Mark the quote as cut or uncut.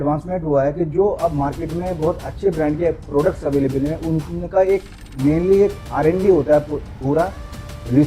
uncut